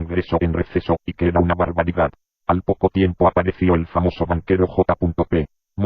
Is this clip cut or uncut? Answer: cut